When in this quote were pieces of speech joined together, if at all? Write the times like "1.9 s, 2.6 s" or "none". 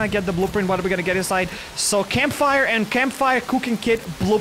none